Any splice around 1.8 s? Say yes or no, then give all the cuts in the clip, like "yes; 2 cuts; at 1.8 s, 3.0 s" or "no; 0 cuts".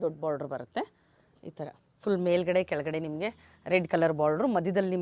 yes; 1 cut; at 1.8 s